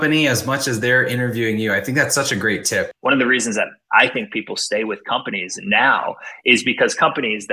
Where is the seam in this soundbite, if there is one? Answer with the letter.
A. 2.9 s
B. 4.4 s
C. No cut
A